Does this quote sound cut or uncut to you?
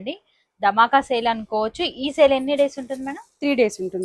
uncut